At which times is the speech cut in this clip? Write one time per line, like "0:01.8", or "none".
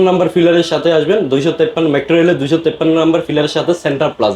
none

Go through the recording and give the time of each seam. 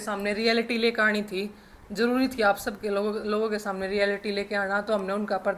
none

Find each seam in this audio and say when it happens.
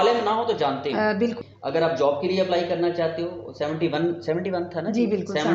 0:01.4

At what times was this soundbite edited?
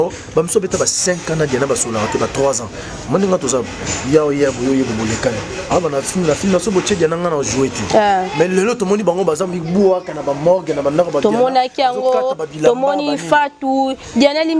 none

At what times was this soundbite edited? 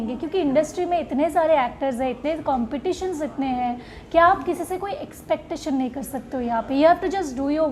none

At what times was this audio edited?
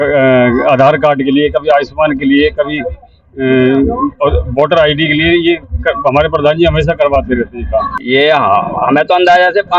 0:08.0

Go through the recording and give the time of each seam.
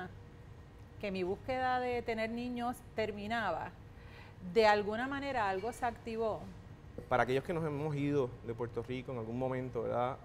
0:07.0

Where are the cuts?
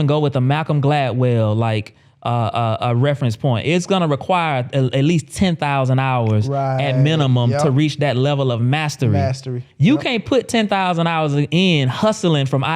none

